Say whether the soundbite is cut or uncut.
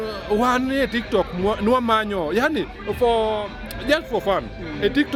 uncut